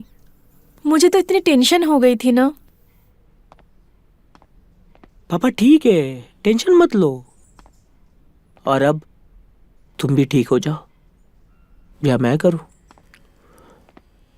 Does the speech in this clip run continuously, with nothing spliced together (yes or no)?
yes